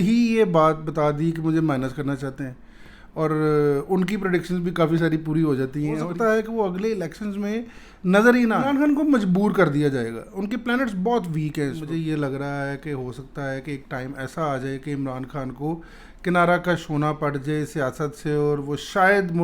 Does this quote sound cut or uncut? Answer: cut